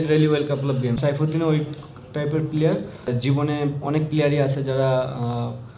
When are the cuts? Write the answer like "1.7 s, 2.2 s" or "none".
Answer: 1.0 s, 3.1 s